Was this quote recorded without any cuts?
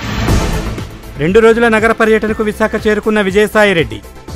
no; 1 cut; at 0.9 s

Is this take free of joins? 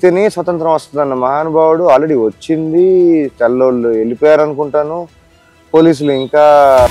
yes; 0 cuts

